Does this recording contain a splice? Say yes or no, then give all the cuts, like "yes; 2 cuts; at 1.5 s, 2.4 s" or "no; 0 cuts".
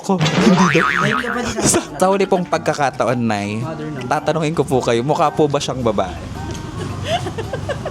yes; 1 cut; at 2.0 s